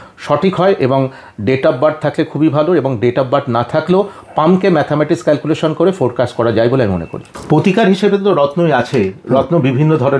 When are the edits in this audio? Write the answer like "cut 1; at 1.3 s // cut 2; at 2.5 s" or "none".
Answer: cut 1; at 7.3 s